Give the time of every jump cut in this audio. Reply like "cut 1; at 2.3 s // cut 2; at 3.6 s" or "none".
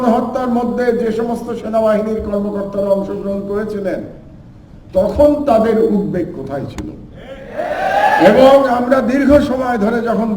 none